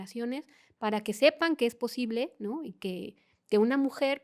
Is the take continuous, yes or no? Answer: yes